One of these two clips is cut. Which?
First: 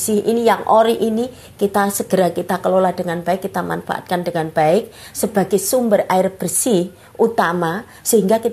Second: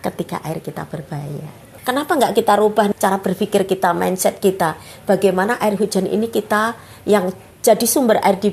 second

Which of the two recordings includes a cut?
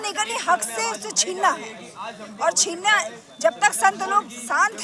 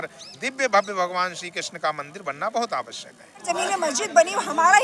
second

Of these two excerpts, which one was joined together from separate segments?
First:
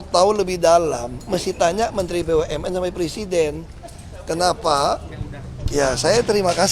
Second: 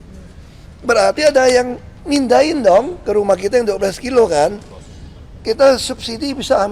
first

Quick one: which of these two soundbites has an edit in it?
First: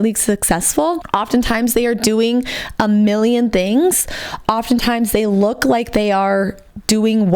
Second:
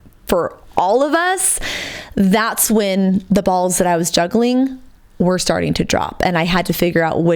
first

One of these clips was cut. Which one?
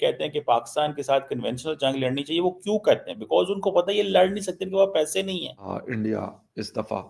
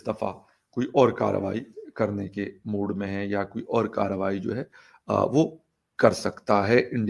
first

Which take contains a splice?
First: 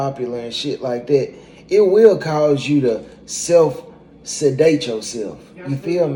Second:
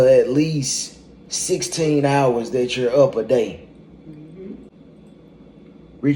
second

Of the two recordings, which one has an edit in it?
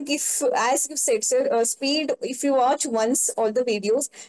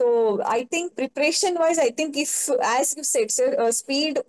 second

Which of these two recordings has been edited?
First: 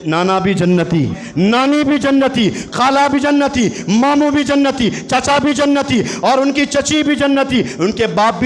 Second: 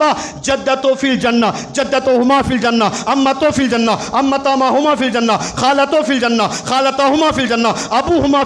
first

